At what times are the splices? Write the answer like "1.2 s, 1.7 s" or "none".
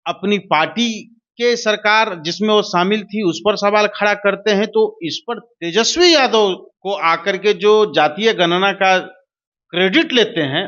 6.7 s